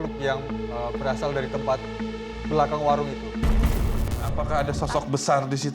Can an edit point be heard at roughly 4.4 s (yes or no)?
yes